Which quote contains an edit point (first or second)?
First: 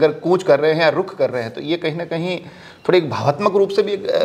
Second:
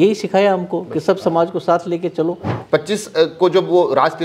second